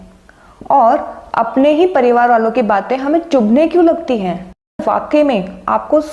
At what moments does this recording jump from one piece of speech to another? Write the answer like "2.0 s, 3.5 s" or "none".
4.8 s